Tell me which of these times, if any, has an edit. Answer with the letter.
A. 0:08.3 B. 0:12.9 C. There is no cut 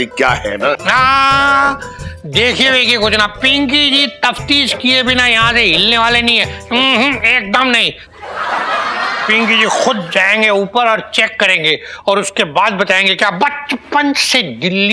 C